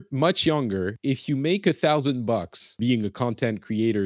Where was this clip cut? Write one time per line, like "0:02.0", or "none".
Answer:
0:00.9
0:02.8